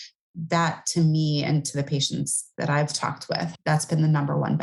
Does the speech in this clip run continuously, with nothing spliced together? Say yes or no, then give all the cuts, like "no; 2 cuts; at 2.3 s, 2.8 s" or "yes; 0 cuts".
no; 1 cut; at 3.5 s